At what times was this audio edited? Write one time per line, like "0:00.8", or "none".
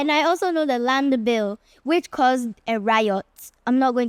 none

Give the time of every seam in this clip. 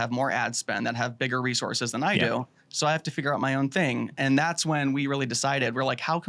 none

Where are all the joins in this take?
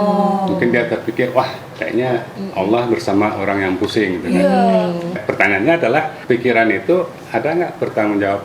0:02.4
0:05.2
0:06.1

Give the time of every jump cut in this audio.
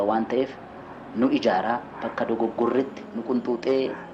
0:03.0

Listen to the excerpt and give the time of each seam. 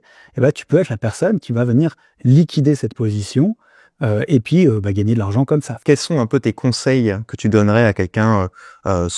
0:05.7

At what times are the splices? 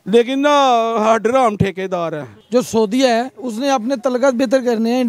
0:02.3

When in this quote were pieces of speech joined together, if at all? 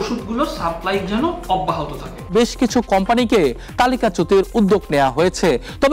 0:02.3

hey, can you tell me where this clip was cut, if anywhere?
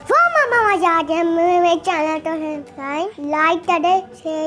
0:03.1

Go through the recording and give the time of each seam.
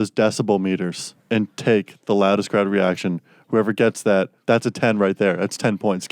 none

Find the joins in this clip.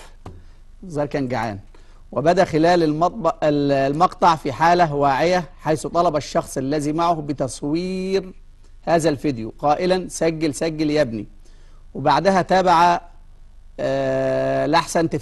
0:04.4

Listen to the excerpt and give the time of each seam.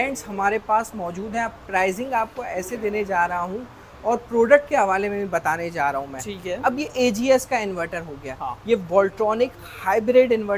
none

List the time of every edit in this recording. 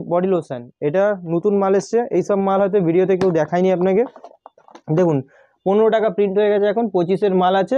none

